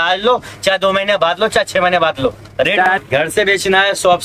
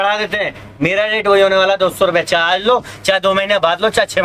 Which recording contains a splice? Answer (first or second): first